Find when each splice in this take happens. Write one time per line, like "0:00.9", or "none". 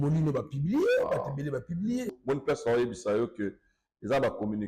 0:02.2

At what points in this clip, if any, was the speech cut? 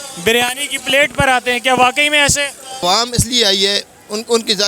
0:02.8

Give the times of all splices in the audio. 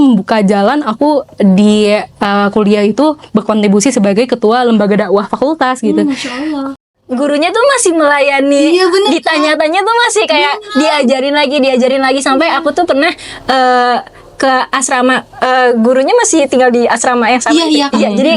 0:06.7

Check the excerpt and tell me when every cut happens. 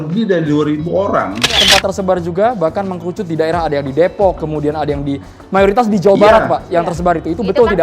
0:01.6

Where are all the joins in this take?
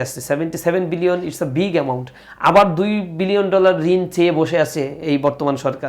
none

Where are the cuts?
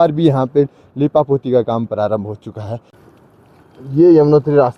0:02.9

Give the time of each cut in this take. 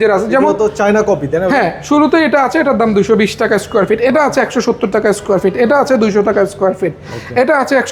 none

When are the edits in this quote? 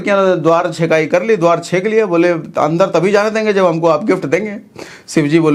none

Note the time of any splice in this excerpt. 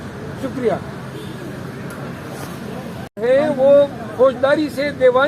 0:03.1

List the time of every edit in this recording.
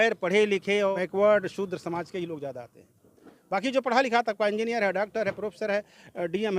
0:00.9

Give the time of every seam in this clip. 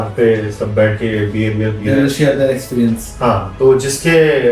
none

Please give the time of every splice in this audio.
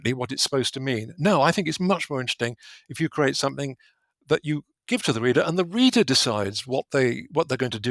none

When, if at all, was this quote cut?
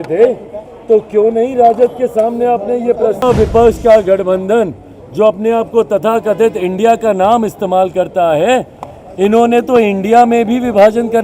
0:03.2

